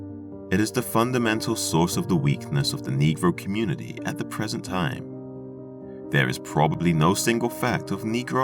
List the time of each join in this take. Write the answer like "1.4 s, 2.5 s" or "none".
4.3 s

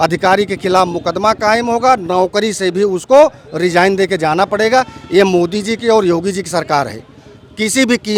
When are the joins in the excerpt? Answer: none

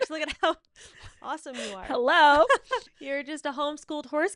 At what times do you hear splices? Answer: 2.9 s

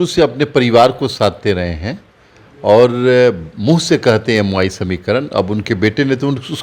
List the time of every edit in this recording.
none

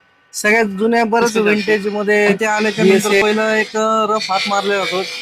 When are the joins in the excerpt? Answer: 3.2 s

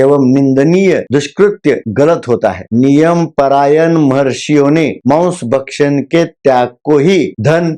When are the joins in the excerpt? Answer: 2.6 s

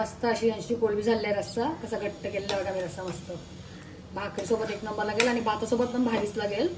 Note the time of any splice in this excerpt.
none

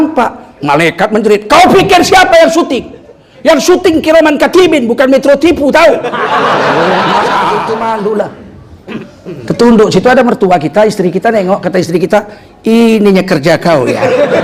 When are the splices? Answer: 7.6 s

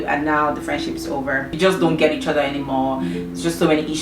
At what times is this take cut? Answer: 1.5 s

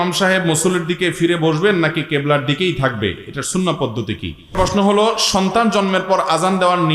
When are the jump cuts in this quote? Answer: 4.6 s

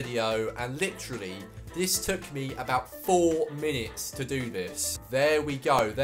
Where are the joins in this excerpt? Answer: 4.8 s

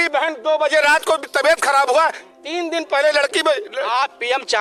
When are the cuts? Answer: none

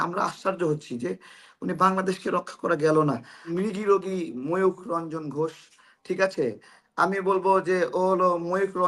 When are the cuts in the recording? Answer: 3.5 s

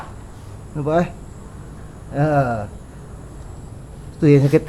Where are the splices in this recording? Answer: none

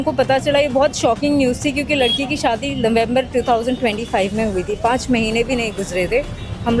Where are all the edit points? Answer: none

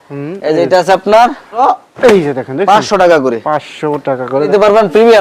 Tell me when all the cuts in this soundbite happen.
1.6 s, 4.5 s

